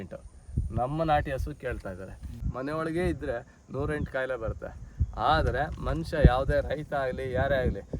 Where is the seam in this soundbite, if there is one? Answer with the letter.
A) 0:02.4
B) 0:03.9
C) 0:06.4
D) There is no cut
A